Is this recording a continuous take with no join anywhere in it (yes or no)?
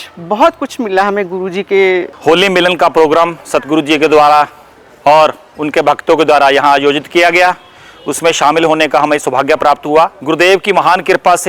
no